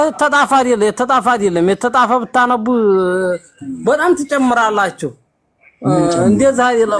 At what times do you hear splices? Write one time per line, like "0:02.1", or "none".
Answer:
none